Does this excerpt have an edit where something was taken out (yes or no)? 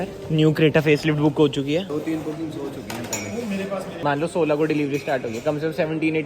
yes